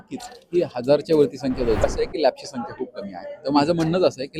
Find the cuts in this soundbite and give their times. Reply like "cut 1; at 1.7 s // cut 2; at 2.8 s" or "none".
cut 1; at 1.8 s